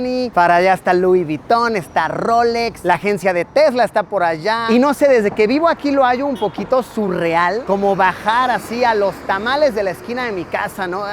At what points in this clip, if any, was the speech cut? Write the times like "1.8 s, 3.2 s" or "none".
2.8 s, 4.6 s